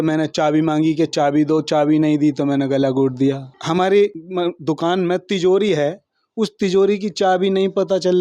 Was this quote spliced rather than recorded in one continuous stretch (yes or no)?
yes